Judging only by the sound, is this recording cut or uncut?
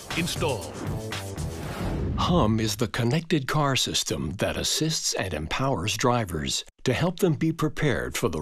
cut